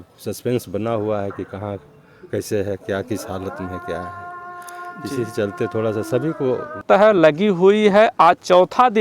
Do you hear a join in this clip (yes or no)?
yes